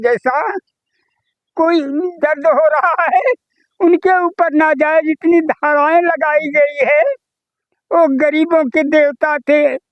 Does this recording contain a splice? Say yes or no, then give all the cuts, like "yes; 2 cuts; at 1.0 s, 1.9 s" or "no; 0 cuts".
no; 0 cuts